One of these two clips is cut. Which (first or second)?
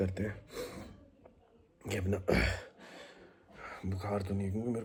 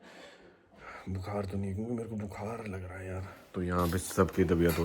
second